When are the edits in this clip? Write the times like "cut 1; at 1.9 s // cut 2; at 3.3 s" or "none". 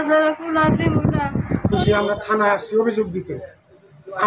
cut 1; at 1.7 s